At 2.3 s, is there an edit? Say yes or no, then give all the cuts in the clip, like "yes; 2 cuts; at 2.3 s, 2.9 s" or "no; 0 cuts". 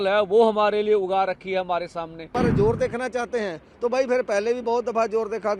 yes; 1 cut; at 2.3 s